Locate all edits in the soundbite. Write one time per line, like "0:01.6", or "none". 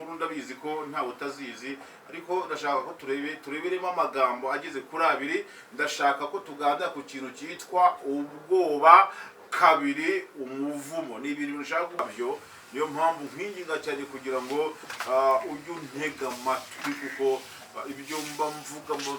0:12.0